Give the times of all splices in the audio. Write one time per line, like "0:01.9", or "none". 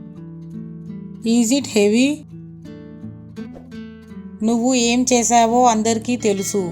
0:01.2
0:02.2
0:03.7